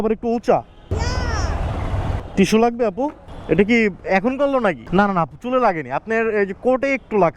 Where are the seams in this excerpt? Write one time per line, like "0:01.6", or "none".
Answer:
0:00.9
0:02.2
0:04.8